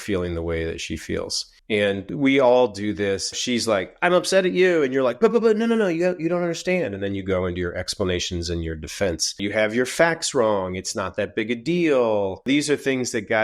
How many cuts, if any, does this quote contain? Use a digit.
4